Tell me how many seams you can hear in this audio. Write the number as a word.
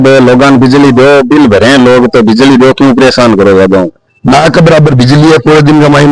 one